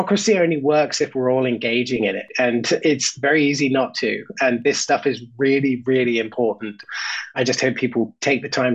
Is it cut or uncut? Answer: uncut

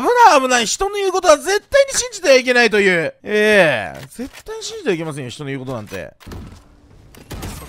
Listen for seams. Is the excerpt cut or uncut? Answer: uncut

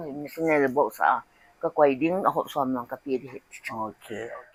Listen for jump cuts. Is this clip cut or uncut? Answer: uncut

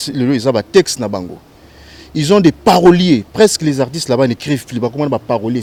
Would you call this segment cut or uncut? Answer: uncut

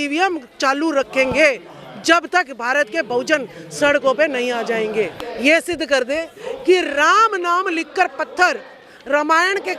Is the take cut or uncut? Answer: cut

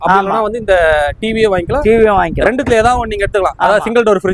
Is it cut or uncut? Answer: uncut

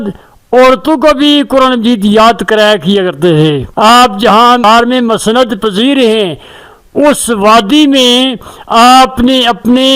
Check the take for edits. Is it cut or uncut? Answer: cut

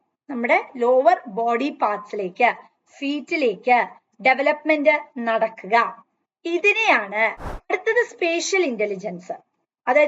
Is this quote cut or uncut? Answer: cut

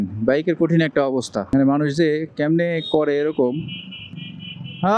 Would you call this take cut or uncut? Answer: cut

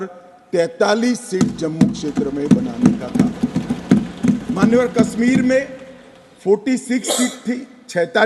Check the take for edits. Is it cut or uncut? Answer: uncut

